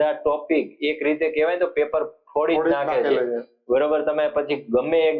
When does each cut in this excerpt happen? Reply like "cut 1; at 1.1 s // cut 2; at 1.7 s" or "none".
none